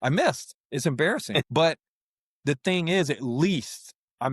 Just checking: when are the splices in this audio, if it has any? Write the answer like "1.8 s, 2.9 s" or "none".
1.3 s